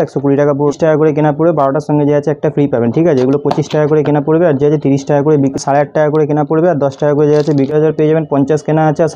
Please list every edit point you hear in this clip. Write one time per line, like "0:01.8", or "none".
0:00.7
0:05.6
0:07.7